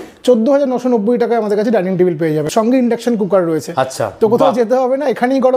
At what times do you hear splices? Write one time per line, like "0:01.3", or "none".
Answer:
0:02.4